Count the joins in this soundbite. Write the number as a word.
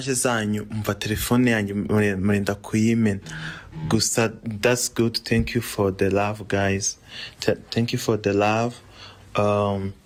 zero